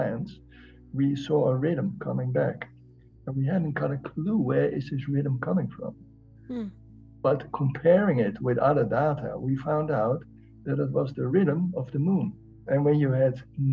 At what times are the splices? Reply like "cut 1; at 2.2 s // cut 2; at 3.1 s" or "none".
cut 1; at 11.3 s // cut 2; at 12.6 s